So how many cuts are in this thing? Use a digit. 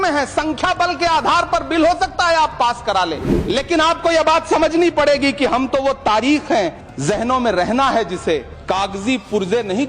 3